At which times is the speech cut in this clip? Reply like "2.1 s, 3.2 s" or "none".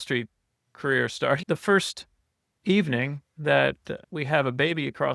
1.4 s, 3.9 s